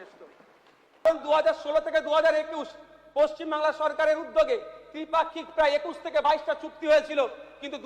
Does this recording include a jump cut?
yes; 1 cut; at 1.0 s

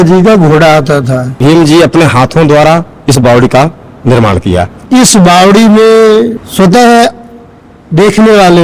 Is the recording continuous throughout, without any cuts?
no; 2 cuts; at 1.3 s, 4.8 s

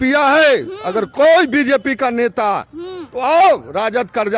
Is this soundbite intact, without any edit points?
yes; 0 cuts

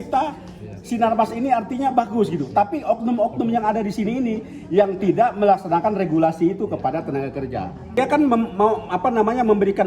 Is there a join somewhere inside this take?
yes; 1 cut; at 8.0 s

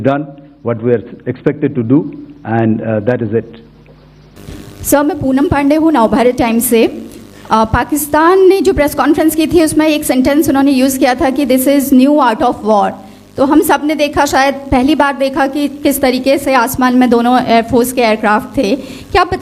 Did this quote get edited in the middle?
no; 0 cuts

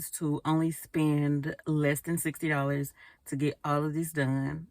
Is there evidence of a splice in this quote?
yes; 1 cut; at 1.6 s

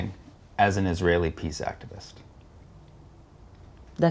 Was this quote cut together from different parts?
yes; 1 cut; at 2.7 s

